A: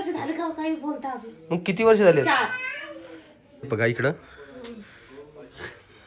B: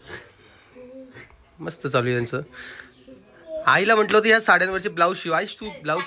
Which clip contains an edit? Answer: A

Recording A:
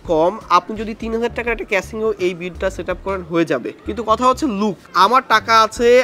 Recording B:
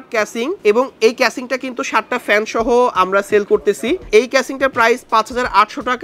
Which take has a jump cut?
A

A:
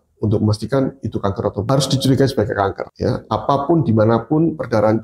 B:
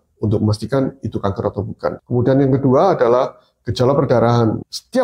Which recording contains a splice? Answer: A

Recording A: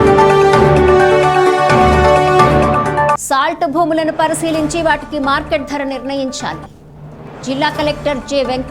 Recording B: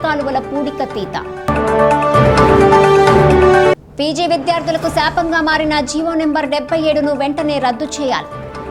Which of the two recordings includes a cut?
A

